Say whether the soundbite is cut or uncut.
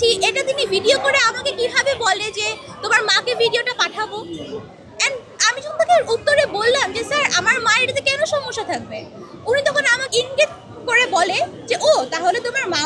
cut